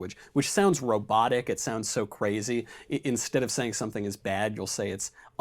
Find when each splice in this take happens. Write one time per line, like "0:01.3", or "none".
0:03.7

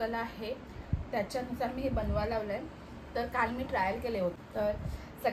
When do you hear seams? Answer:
0:04.3

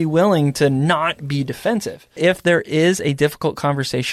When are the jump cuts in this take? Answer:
0:02.1

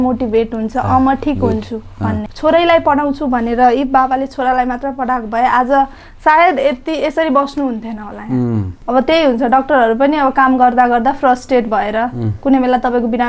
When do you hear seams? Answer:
0:02.3
0:08.7

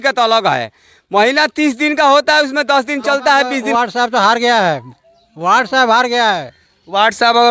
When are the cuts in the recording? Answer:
0:03.6

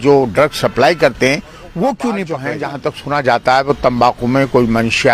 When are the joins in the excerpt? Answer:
0:02.5

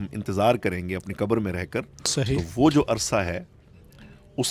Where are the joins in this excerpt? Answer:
none

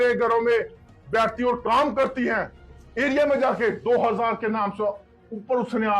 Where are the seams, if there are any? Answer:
0:03.2

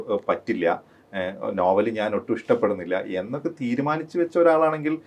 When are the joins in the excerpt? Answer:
none

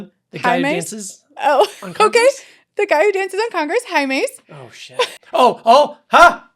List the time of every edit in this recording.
0:05.2

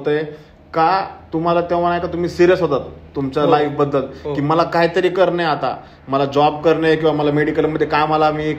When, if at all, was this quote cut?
none

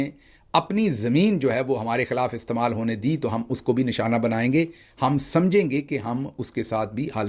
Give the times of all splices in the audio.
none

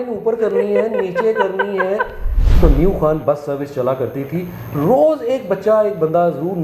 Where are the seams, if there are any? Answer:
0:02.4

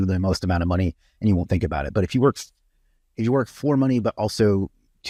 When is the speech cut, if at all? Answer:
none

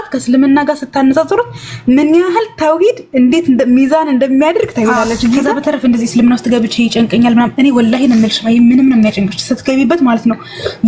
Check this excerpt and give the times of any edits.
0:05.5

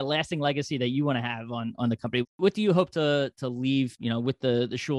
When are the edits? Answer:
0:02.4
0:04.0

